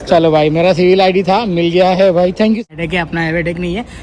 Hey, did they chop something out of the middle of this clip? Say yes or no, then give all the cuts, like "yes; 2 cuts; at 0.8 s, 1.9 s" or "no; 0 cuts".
yes; 1 cut; at 2.7 s